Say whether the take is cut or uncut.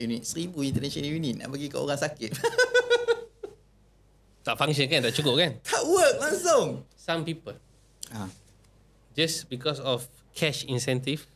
cut